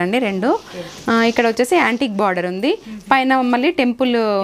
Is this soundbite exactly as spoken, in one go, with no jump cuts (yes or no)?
yes